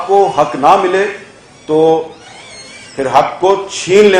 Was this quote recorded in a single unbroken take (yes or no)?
yes